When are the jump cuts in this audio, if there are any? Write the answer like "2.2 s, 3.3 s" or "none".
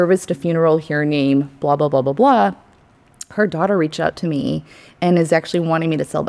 none

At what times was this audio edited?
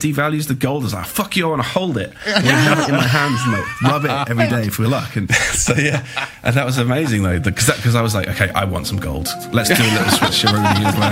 5.3 s

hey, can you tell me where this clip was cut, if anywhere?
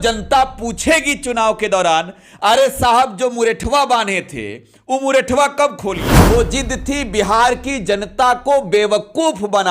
6.1 s

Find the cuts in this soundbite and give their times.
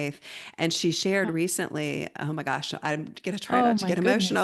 none

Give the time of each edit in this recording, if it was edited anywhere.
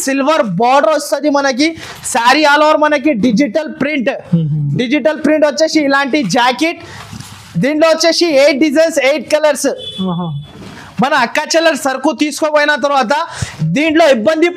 none

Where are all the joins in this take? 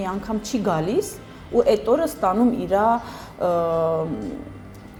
none

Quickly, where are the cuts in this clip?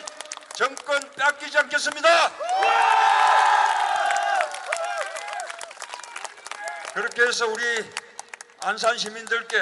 3.8 s

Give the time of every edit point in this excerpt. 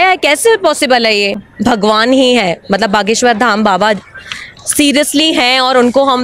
1.5 s

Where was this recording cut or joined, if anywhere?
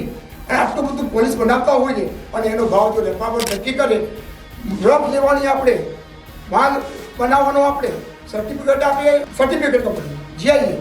9.3 s

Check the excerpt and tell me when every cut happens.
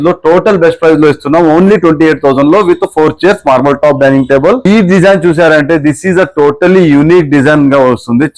4.7 s

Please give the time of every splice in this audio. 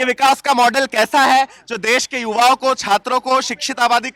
none

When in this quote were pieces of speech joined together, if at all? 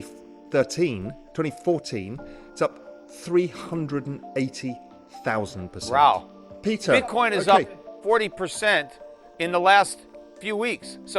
6.5 s

